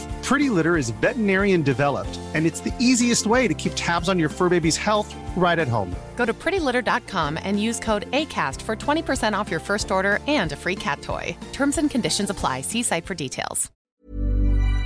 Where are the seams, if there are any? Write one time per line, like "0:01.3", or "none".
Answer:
0:13.7